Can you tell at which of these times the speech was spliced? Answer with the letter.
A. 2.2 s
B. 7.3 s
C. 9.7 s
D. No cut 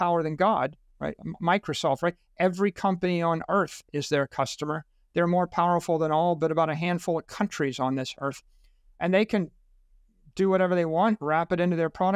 D